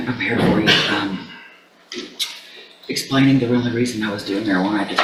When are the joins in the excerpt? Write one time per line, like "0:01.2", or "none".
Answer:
none